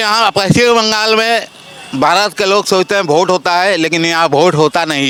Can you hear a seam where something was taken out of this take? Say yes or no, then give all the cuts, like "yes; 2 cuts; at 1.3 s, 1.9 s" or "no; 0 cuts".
no; 0 cuts